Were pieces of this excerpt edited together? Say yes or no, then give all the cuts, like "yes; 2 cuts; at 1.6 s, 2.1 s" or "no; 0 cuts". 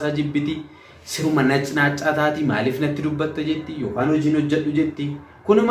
no; 0 cuts